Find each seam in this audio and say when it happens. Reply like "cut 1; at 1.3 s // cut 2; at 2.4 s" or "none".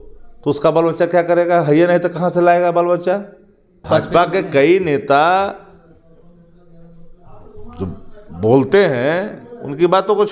cut 1; at 3.8 s